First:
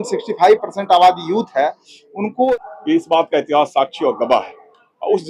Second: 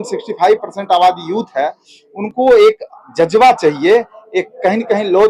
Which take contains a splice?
first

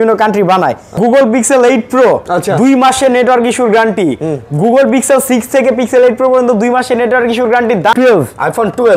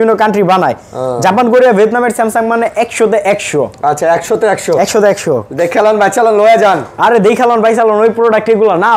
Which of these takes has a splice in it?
first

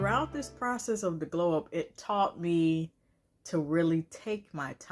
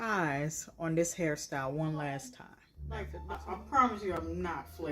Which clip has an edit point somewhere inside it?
second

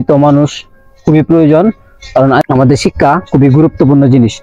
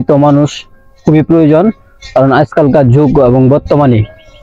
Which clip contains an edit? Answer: first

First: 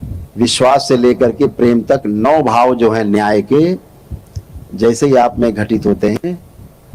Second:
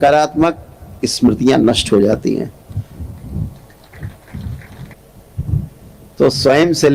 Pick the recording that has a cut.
second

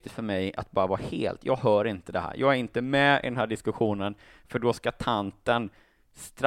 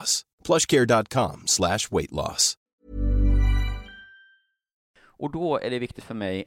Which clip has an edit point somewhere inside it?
second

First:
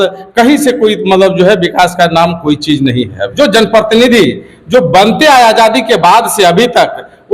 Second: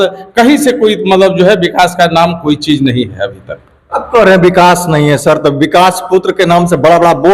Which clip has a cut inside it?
first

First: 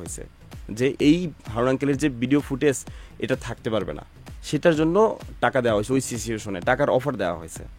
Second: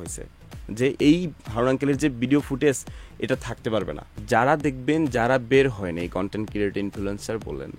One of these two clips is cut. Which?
second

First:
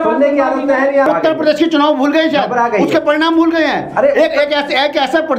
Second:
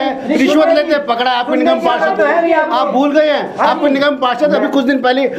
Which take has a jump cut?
first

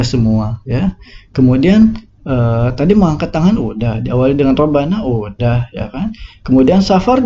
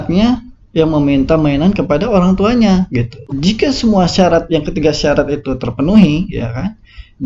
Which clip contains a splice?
second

